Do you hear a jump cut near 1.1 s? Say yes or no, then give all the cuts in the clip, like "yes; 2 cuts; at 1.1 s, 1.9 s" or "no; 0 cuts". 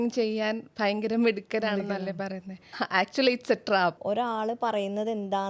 no; 2 cuts; at 2.7 s, 4.0 s